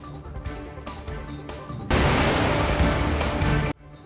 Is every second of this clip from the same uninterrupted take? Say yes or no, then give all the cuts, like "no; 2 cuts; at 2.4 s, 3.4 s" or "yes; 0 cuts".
yes; 0 cuts